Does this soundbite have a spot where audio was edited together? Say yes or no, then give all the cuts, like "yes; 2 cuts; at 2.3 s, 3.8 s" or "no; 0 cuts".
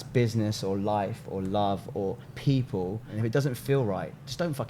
yes; 1 cut; at 3.1 s